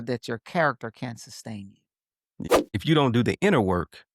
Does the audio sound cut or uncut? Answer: cut